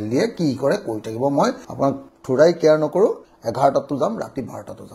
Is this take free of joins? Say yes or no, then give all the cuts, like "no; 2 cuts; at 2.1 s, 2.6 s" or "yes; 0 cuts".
no; 1 cut; at 3.3 s